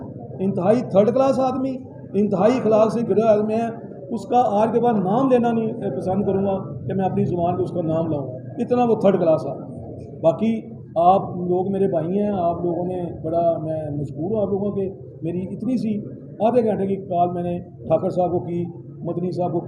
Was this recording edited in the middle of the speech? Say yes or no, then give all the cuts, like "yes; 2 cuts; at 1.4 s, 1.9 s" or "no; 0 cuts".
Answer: no; 0 cuts